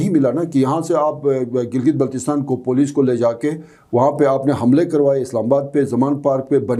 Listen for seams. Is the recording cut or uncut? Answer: uncut